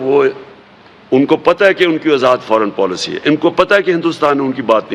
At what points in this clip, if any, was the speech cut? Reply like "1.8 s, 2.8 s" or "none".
none